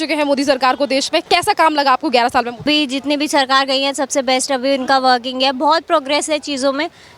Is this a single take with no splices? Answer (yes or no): no